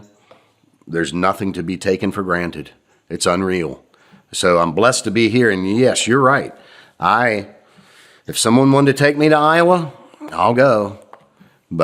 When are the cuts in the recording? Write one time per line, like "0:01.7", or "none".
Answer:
none